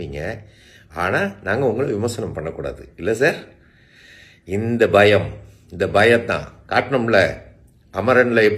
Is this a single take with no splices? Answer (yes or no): yes